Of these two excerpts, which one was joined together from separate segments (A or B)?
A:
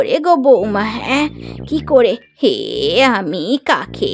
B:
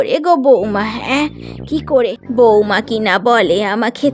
B